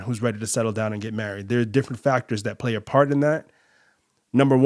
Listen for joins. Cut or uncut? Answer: uncut